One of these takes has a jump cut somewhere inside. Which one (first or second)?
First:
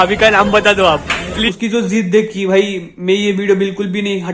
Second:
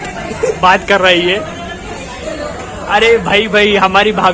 first